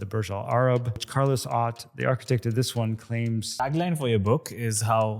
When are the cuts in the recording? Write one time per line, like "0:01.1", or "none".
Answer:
0:01.1
0:03.6